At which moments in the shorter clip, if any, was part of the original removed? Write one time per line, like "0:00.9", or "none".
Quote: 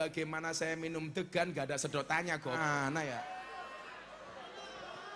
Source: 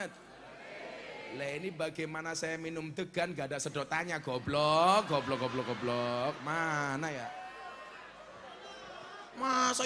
0:02.6